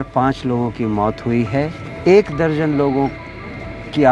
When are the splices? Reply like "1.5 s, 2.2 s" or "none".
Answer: 1.9 s